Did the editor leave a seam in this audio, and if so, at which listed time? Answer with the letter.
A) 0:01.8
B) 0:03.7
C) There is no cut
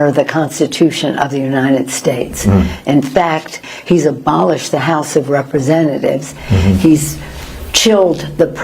B